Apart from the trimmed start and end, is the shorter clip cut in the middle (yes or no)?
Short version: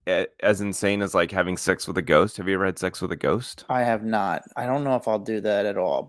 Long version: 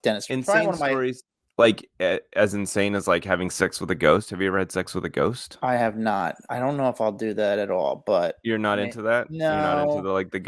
no